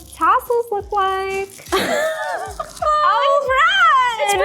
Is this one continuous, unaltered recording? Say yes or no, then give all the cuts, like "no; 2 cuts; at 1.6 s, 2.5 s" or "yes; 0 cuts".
no; 2 cuts; at 1.6 s, 2.8 s